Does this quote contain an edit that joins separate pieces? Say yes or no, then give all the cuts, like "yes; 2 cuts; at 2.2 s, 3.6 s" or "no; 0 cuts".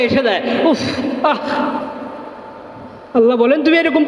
no; 0 cuts